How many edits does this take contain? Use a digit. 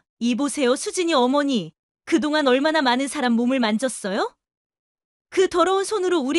0